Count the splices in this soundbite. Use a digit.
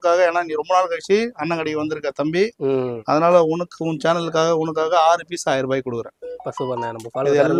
0